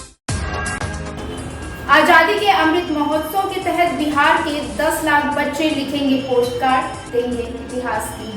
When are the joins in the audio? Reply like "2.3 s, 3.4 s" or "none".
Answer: 1.0 s